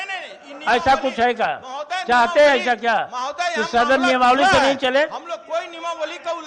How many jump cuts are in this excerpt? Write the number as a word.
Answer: zero